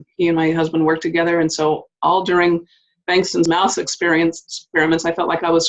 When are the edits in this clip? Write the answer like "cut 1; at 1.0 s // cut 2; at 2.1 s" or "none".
cut 1; at 3.5 s